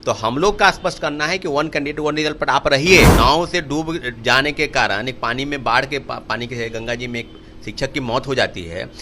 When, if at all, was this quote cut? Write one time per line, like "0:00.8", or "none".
0:03.1